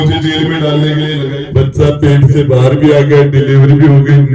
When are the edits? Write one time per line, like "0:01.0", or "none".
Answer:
0:01.3